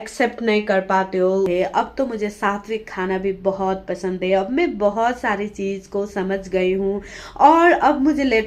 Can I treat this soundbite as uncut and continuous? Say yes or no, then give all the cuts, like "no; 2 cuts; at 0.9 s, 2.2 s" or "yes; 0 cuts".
no; 1 cut; at 1.5 s